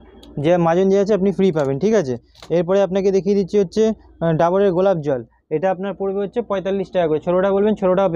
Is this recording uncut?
yes; 0 cuts

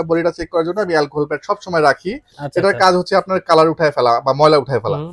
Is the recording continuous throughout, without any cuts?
yes; 0 cuts

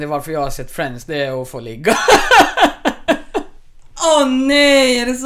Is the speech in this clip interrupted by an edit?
no; 0 cuts

